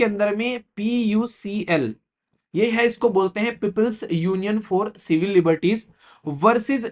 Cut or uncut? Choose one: uncut